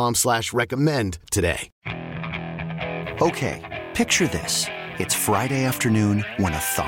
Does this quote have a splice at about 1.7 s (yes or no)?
yes